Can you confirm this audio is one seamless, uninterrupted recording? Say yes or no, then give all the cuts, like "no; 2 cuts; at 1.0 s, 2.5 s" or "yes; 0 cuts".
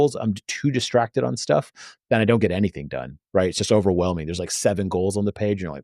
yes; 0 cuts